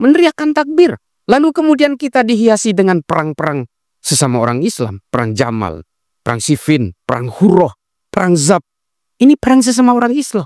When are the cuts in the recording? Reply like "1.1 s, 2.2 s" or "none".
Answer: 1.2 s